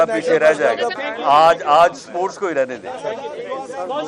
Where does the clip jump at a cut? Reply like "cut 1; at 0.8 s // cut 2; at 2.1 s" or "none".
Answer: cut 1; at 1.0 s